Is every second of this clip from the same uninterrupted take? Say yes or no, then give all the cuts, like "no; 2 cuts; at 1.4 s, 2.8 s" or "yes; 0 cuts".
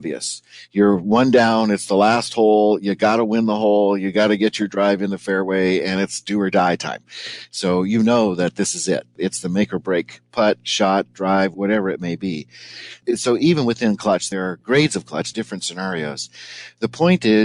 no; 5 cuts; at 9.2 s, 11.5 s, 12.9 s, 14.3 s, 15.3 s